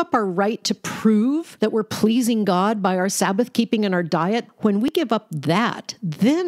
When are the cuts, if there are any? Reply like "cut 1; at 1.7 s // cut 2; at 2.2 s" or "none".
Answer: cut 1; at 1.5 s // cut 2; at 4.9 s